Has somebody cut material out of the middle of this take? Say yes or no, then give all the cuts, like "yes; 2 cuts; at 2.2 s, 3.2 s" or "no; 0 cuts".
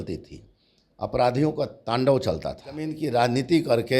yes; 1 cut; at 3.0 s